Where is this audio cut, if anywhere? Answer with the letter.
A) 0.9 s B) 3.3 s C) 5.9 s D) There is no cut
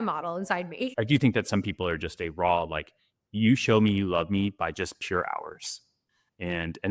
A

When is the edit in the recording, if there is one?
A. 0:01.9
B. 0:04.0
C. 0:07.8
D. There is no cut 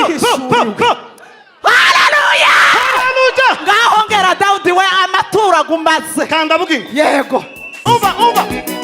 C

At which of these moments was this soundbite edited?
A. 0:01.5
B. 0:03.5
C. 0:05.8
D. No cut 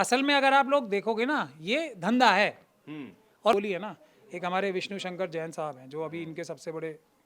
B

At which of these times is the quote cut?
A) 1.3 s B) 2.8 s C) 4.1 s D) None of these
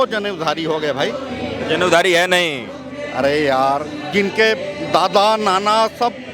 D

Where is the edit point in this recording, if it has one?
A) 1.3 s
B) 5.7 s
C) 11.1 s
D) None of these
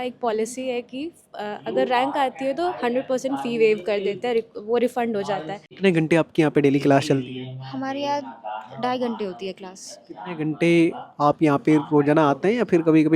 B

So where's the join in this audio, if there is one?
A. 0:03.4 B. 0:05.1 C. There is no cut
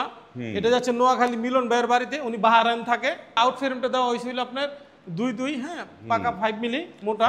A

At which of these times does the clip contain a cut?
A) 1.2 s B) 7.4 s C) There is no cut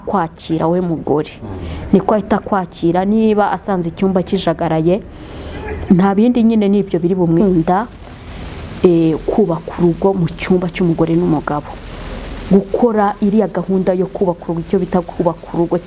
B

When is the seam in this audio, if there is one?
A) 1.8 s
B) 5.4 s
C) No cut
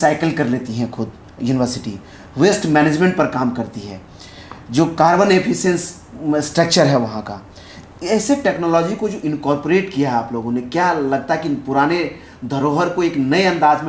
C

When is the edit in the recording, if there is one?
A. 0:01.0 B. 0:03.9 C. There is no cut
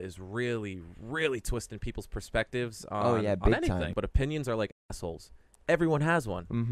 B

